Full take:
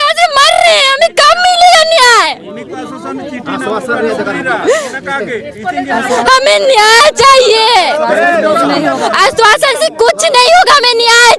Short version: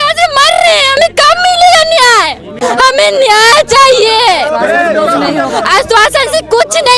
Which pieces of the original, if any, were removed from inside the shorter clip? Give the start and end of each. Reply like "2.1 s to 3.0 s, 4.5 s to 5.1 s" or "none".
2.6 s to 6.0 s